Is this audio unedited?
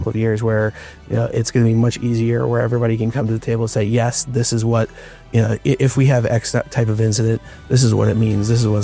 yes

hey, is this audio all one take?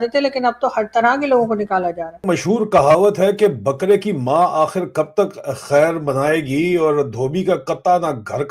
no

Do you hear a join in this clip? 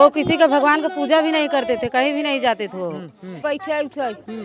yes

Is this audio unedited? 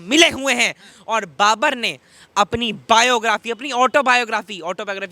yes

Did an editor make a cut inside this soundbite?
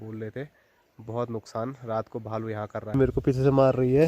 yes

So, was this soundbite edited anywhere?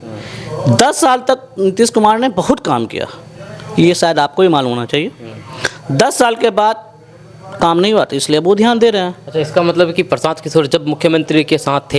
no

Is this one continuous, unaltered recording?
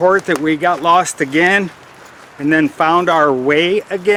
yes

